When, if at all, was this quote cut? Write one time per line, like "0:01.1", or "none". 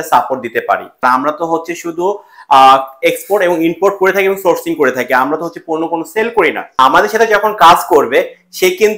0:00.9
0:06.8